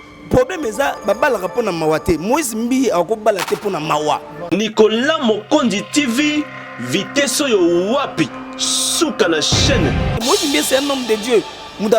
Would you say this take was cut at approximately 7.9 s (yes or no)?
no